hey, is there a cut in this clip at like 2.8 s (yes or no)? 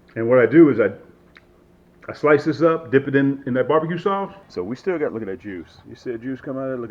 no